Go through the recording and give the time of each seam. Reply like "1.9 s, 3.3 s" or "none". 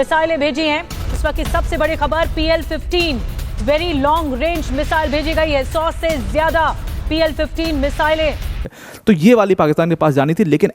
8.7 s